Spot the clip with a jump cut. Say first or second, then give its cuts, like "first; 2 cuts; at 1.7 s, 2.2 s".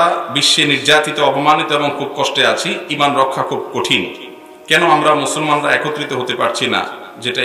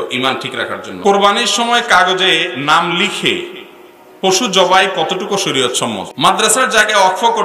second; 2 cuts; at 1.1 s, 6.1 s